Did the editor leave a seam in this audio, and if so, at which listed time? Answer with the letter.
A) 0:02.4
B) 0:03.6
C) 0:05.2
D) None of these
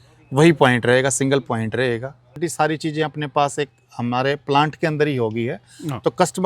A